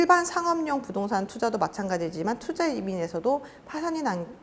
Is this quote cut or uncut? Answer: uncut